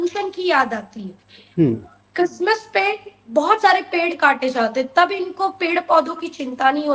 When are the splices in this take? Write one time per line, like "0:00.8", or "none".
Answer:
none